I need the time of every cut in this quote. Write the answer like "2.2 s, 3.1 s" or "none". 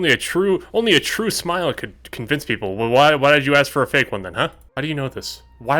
4.7 s

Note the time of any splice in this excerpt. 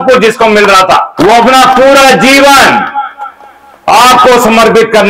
1.1 s

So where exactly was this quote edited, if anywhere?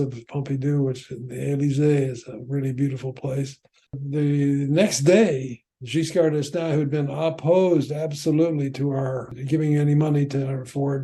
4.0 s, 9.3 s

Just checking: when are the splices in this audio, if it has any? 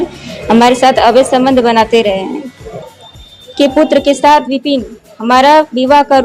3.0 s

